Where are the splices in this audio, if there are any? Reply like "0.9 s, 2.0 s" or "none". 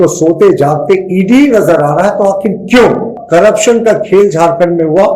3.2 s